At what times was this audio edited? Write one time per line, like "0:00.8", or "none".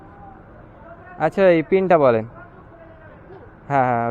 none